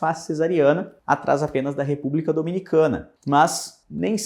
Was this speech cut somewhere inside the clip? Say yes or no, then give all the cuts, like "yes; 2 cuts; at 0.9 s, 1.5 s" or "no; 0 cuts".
yes; 1 cut; at 3.1 s